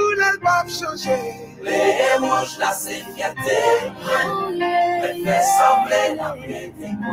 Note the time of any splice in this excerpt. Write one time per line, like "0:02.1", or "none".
none